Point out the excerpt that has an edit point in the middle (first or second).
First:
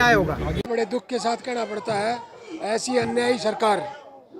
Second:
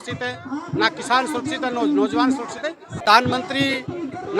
second